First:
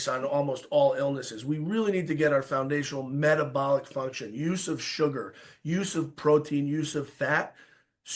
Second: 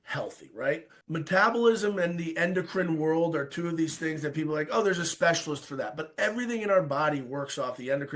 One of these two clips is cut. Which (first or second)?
second